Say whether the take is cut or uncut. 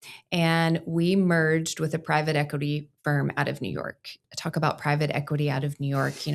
cut